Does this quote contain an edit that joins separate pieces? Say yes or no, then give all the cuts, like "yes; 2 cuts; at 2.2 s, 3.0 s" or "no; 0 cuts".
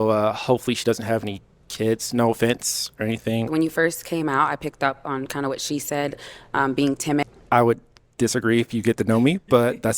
yes; 2 cuts; at 3.5 s, 7.2 s